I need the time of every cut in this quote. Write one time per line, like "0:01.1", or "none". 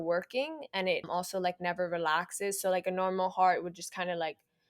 0:01.1

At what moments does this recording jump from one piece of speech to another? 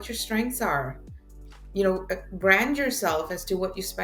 none

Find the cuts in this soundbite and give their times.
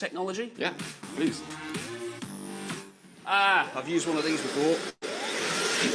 0:04.6

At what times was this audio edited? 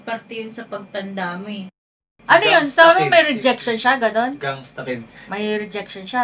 0:01.9

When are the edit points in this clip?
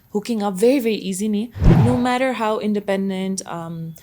0:01.6

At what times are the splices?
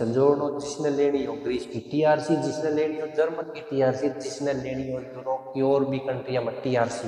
none

